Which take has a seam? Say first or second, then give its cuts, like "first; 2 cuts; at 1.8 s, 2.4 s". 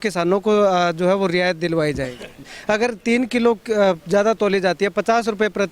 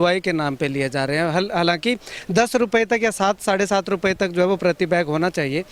first; 1 cut; at 2.5 s